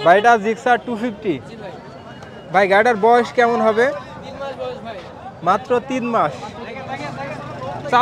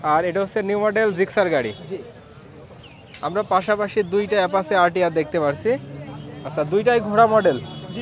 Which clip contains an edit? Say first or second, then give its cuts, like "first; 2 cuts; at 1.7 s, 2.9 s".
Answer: second; 1 cut; at 2.7 s